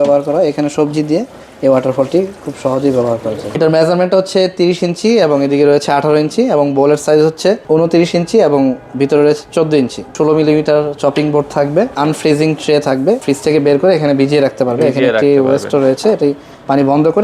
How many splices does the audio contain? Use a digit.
5